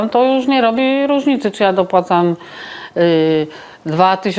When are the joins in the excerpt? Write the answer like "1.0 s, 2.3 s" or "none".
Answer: none